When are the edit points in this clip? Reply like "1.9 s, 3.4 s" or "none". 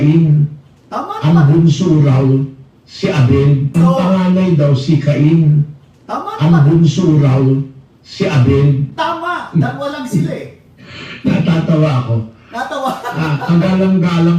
3.7 s